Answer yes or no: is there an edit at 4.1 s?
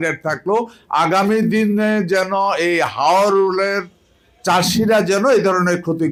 no